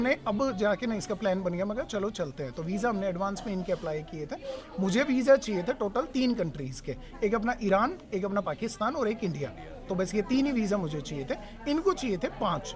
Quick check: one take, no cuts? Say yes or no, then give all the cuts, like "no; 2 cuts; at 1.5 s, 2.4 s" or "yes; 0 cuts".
yes; 0 cuts